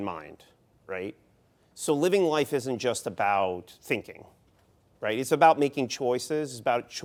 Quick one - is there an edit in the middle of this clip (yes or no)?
no